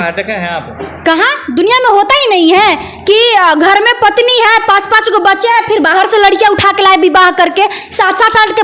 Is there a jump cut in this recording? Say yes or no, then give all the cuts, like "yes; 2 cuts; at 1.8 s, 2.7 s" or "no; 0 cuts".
no; 0 cuts